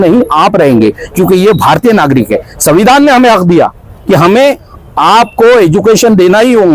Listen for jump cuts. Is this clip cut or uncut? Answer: uncut